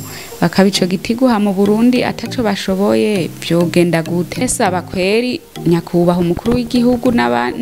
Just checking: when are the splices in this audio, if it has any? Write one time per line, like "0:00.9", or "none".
0:04.4